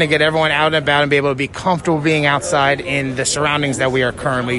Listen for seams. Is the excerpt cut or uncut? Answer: uncut